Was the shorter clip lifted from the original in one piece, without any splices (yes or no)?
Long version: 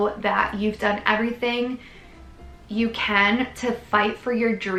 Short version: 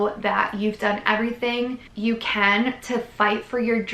no